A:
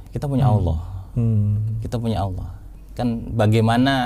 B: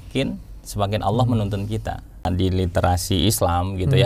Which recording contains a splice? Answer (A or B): B